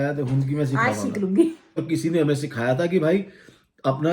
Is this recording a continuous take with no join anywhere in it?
no; 1 cut; at 1.8 s

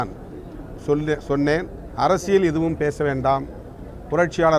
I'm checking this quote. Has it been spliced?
yes; 1 cut; at 1.8 s

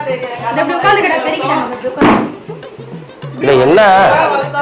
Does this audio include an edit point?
no; 0 cuts

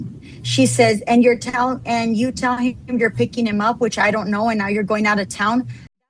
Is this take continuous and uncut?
yes; 0 cuts

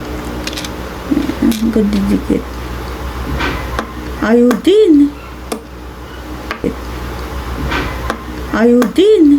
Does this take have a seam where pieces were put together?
yes; 1 cut; at 6.7 s

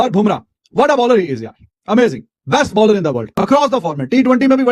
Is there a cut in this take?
no; 0 cuts

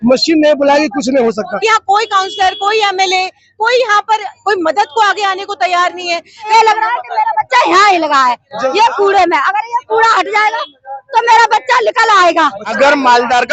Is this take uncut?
no; 3 cuts; at 1.5 s, 6.5 s, 12.7 s

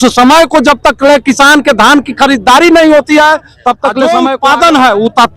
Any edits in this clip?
yes; 1 cut; at 4.1 s

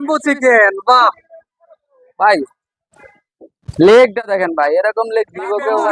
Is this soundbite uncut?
yes; 0 cuts

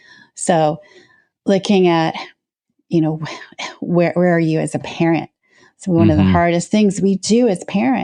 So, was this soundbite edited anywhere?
no; 0 cuts

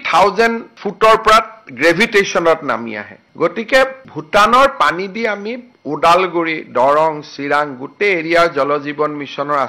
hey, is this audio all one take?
yes; 0 cuts

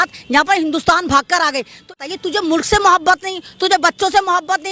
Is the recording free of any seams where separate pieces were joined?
no; 1 cut; at 2.0 s

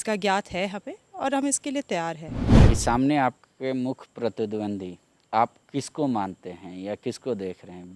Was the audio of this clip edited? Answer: yes; 1 cut; at 2.5 s

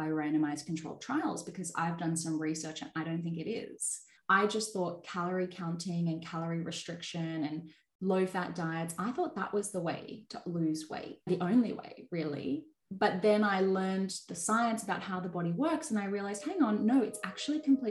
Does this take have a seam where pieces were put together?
yes; 2 cuts; at 4.1 s, 11.3 s

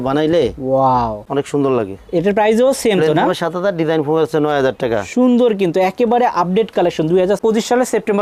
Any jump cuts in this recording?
no; 0 cuts

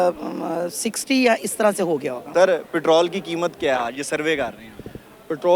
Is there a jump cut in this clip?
yes; 1 cut; at 2.2 s

